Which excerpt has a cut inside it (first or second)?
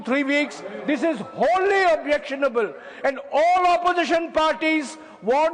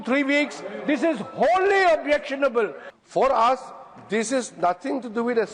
second